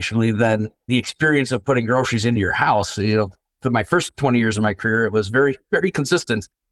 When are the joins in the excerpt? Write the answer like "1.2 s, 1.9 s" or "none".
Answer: 2.4 s